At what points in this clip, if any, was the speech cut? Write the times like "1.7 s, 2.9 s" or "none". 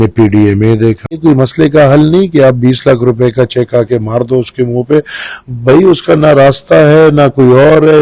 1.2 s